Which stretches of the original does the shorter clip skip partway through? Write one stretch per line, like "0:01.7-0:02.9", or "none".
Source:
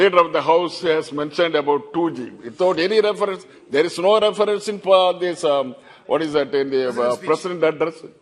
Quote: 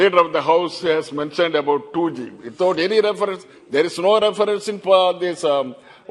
none